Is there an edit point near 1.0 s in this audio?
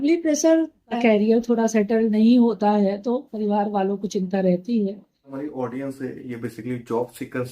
yes; 2 cuts; at 1.0 s, 5.4 s

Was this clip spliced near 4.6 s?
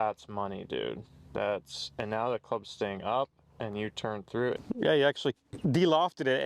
yes; 1 cut; at 4.6 s

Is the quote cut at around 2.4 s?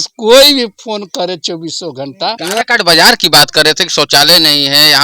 yes; 1 cut; at 2.4 s

